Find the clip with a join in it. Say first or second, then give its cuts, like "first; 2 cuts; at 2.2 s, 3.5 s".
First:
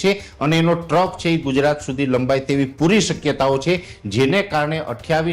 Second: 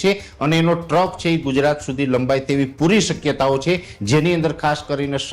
second; 1 cut; at 3.9 s